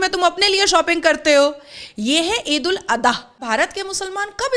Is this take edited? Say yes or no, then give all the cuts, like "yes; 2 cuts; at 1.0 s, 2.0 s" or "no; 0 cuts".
yes; 1 cut; at 3.4 s